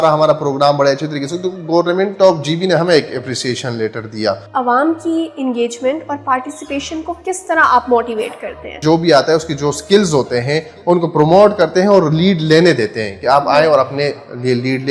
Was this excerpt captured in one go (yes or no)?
no